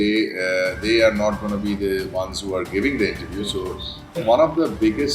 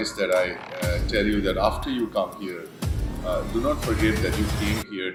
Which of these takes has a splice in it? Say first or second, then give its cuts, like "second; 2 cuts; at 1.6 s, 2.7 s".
first; 1 cut; at 4.1 s